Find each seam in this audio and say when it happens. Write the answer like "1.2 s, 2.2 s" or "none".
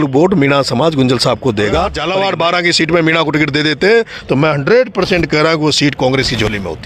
2.0 s